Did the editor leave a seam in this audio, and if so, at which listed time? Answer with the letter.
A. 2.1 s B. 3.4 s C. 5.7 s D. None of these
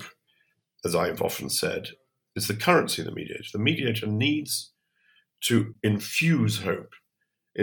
C